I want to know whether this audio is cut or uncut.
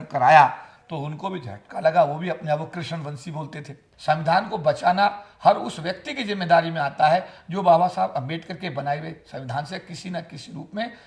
cut